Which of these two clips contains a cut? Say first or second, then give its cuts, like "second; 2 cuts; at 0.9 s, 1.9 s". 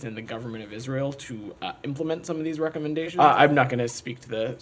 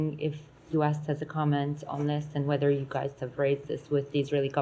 first; 1 cut; at 3.1 s